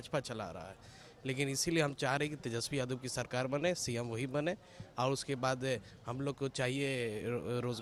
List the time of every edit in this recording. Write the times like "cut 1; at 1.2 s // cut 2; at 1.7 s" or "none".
none